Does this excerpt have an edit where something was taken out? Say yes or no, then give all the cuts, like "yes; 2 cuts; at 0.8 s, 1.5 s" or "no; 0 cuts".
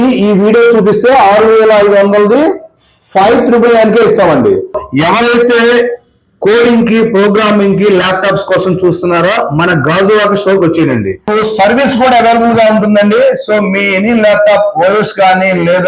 yes; 2 cuts; at 4.8 s, 11.2 s